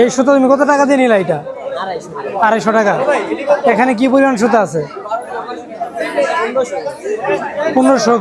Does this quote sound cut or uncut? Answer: uncut